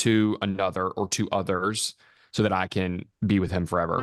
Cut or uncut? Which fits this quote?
cut